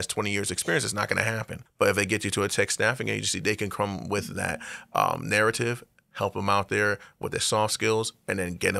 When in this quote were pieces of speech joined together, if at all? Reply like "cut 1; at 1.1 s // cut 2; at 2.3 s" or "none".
cut 1; at 1.6 s